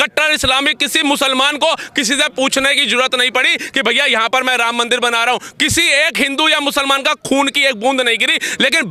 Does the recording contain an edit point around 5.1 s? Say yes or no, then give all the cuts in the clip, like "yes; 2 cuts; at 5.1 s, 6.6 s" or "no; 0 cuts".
no; 0 cuts